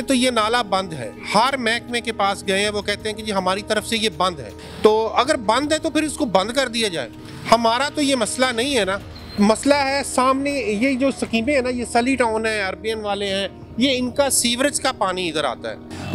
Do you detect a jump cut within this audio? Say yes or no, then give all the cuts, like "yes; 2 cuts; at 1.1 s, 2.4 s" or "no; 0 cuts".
no; 0 cuts